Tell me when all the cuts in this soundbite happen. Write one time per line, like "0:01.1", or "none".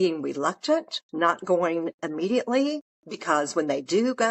0:01.0